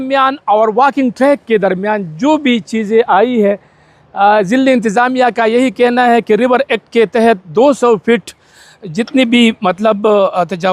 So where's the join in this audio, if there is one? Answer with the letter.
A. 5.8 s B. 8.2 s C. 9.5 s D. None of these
D